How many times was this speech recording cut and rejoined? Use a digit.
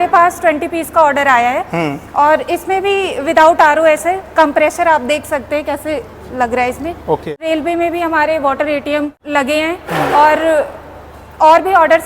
2